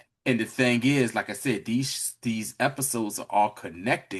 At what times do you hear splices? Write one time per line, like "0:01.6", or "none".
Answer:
none